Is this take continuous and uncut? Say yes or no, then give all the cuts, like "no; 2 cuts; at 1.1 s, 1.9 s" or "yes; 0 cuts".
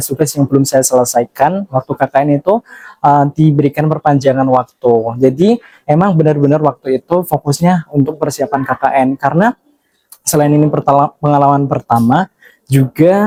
yes; 0 cuts